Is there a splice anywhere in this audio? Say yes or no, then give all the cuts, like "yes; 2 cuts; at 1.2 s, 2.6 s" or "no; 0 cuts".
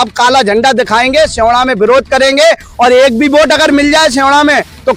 no; 0 cuts